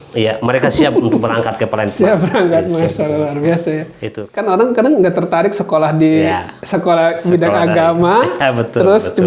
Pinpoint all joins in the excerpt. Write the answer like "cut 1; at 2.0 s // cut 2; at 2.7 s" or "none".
cut 1; at 4.2 s